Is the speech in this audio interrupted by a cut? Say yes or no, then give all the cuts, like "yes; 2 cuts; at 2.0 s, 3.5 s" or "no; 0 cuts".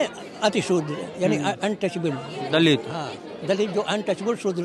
no; 0 cuts